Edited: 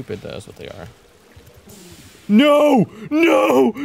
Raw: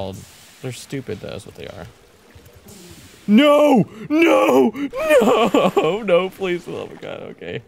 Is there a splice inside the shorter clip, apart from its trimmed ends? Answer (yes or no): no